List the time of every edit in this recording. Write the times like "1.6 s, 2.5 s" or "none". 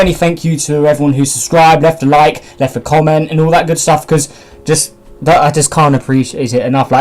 5.5 s